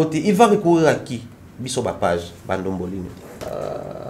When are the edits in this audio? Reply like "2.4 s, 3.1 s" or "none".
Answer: none